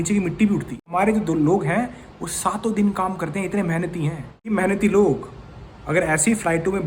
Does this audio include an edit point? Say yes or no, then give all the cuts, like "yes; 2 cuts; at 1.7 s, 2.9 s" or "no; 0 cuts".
yes; 2 cuts; at 0.9 s, 4.3 s